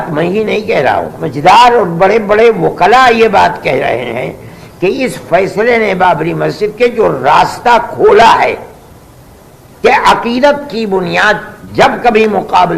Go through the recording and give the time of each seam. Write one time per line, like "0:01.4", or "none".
0:01.1